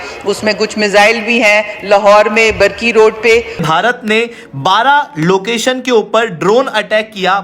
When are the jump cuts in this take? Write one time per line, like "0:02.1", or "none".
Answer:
0:03.6